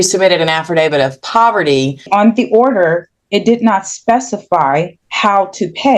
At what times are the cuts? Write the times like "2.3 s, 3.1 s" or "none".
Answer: 2.1 s, 5.0 s